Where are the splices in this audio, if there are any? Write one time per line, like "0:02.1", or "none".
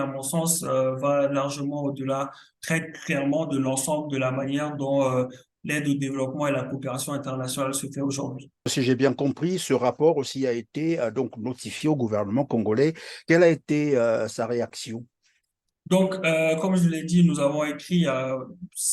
0:08.5